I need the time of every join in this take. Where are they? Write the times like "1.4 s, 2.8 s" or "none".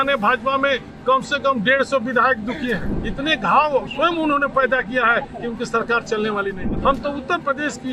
3.0 s, 6.6 s

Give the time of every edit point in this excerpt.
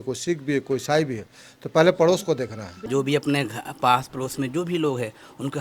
2.9 s

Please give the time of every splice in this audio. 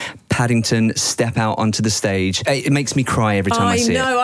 2.4 s

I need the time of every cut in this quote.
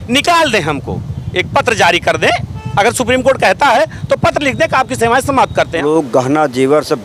5.8 s

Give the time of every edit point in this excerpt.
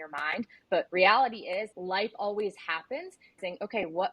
0.9 s, 1.7 s, 3.3 s

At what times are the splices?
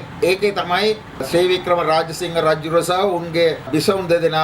1.2 s, 3.7 s

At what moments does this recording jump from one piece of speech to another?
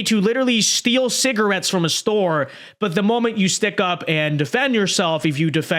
none

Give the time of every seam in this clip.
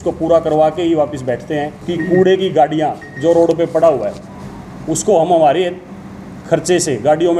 1.8 s

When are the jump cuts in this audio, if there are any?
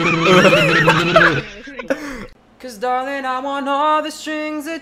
2.2 s

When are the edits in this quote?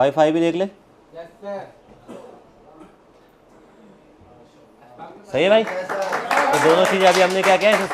none

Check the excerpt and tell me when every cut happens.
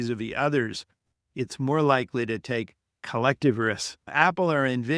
4.0 s

